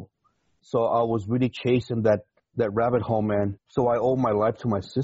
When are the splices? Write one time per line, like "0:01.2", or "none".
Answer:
0:02.4
0:03.6